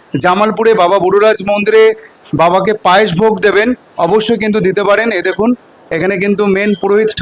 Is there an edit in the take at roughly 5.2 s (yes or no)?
no